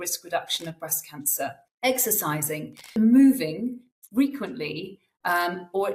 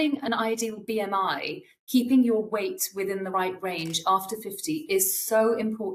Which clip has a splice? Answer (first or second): first